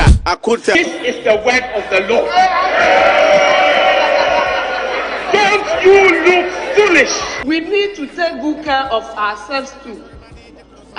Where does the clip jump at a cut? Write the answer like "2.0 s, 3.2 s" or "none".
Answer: none